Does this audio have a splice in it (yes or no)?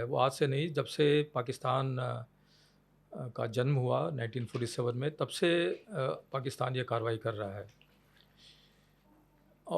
no